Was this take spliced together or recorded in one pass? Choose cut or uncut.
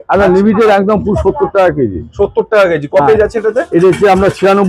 uncut